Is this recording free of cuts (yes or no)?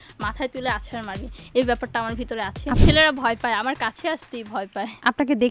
no